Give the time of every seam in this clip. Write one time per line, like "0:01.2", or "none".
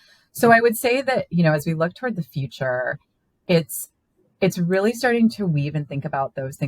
none

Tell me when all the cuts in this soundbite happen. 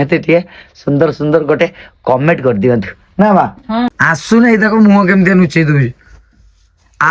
0:03.9

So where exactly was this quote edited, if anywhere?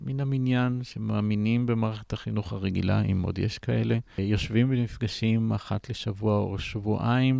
0:04.2

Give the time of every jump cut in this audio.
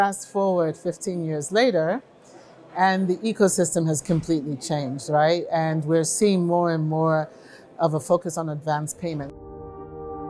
0:09.3

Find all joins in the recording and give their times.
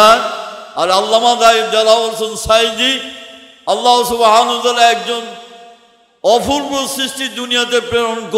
none

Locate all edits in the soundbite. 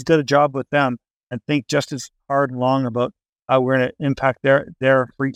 none

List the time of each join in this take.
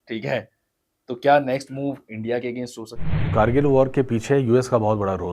0:03.3

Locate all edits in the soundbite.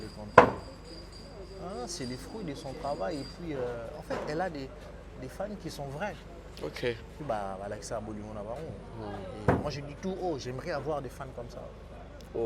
0:07.1

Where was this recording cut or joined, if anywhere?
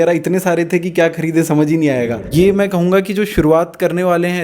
0:02.3

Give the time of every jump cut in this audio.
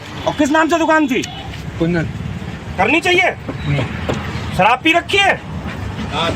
0:03.9

